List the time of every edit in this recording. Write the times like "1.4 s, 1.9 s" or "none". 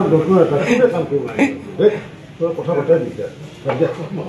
none